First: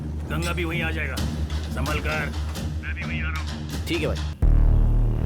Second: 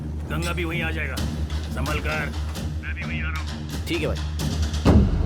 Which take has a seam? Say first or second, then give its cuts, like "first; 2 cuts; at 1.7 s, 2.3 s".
first; 1 cut; at 4.3 s